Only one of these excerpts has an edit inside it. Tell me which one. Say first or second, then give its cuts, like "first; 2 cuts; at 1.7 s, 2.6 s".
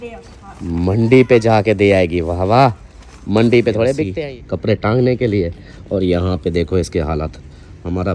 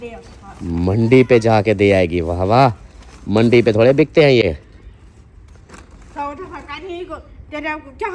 first; 1 cut; at 4.0 s